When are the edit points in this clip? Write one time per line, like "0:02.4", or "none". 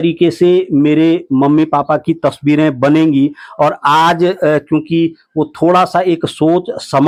none